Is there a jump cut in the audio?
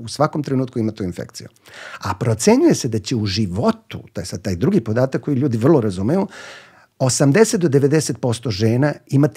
no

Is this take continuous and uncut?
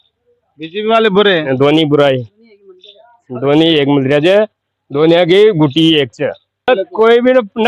no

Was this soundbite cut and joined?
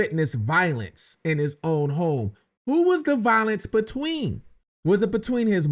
no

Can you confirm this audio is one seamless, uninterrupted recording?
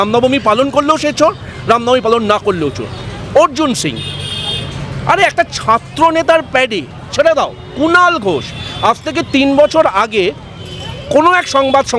yes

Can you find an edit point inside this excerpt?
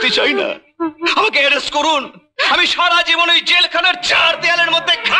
no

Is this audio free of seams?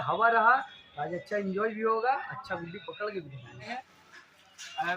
no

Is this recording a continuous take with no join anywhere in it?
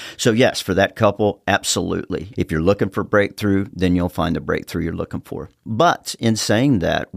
no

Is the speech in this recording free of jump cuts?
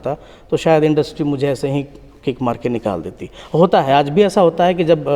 yes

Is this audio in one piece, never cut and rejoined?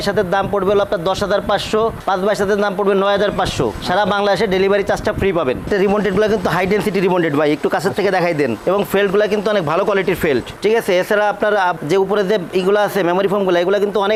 yes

